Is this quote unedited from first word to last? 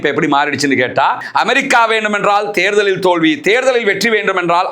no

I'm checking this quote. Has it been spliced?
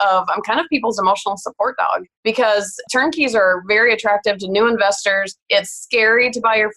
yes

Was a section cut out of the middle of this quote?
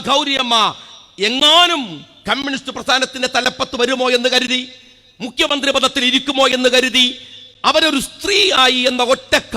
no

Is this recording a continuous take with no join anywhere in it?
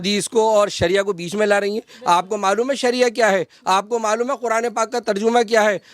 yes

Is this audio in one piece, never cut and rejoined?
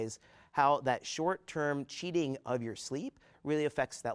yes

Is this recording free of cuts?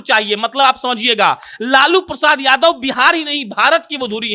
yes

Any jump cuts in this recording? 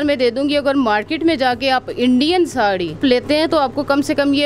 yes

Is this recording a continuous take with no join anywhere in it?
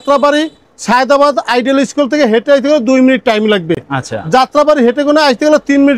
yes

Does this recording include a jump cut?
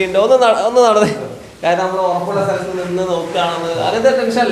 no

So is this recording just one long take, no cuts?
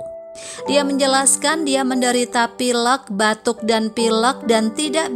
yes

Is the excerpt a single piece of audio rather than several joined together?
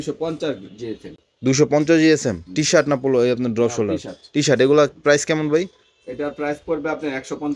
yes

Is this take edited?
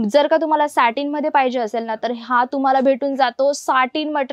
no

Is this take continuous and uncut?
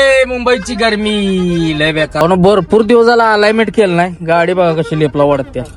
no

